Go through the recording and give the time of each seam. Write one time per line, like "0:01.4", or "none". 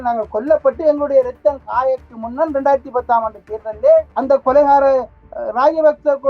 0:04.1